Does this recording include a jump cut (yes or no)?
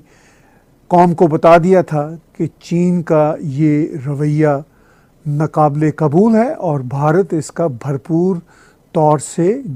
no